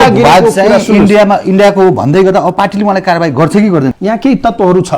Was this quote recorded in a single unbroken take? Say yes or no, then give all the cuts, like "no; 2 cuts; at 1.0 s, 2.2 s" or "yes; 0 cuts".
no; 1 cut; at 4.0 s